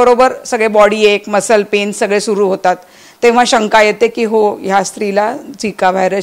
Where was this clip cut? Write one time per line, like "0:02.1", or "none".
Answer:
none